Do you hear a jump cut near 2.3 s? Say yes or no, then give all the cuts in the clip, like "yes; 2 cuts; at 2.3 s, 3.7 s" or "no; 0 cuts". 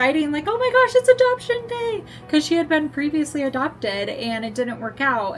no; 0 cuts